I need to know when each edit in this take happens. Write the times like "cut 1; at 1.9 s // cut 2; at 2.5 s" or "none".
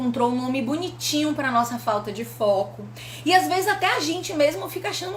none